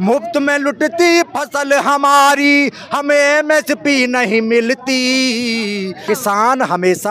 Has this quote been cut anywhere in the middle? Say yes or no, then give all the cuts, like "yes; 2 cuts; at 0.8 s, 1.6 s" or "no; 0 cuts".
yes; 1 cut; at 6.0 s